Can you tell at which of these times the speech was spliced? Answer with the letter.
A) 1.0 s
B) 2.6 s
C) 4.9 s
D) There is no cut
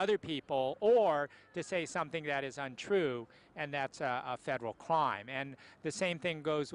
D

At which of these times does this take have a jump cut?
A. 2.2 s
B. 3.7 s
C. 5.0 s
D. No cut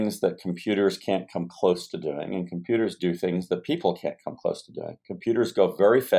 D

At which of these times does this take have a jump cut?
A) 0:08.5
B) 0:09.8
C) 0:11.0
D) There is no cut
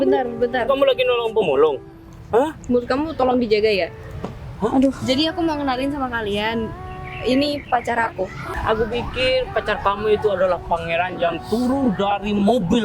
A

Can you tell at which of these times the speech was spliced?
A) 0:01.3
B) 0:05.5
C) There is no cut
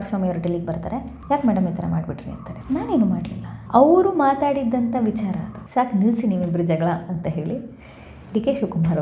B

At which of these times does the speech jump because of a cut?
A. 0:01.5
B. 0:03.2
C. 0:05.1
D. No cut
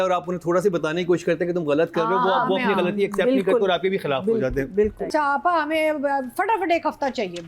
C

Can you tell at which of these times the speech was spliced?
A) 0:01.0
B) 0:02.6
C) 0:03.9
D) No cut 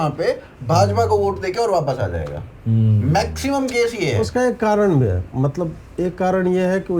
D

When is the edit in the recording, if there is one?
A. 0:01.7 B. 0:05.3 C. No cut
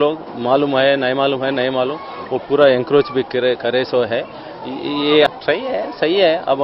B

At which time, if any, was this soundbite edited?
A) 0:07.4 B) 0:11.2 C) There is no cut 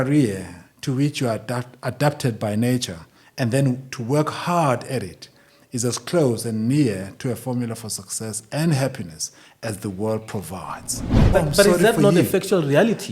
B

